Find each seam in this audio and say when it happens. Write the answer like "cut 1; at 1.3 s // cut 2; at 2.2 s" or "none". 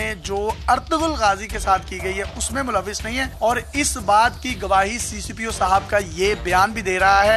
cut 1; at 3.3 s